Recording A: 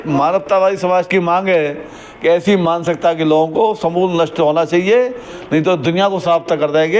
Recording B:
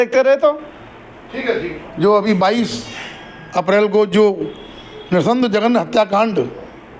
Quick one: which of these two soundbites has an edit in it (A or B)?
B